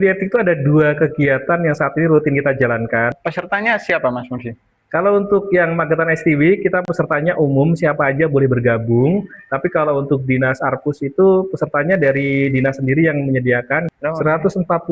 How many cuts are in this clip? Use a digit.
2